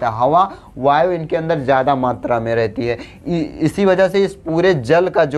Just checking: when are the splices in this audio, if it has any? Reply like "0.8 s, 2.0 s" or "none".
none